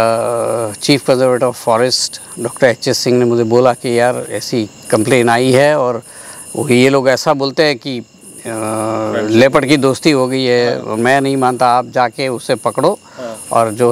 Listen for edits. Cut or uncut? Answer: uncut